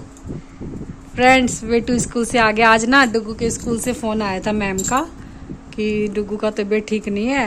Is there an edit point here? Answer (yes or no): no